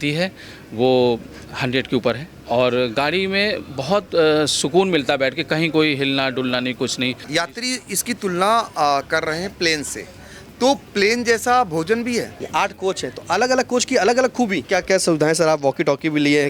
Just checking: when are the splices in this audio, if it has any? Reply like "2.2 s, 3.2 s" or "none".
2.3 s, 7.2 s, 12.4 s, 14.6 s